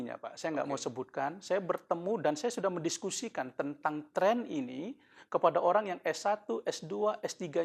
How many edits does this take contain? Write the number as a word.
zero